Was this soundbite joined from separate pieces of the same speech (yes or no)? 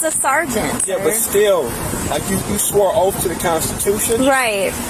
no